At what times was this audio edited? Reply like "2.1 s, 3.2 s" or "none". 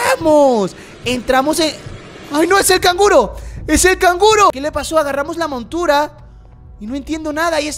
4.5 s